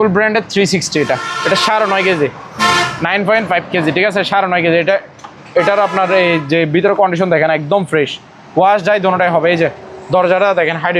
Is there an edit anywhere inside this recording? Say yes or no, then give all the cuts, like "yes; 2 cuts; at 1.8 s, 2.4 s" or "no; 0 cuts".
no; 0 cuts